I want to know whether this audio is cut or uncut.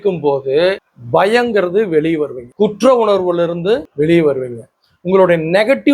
cut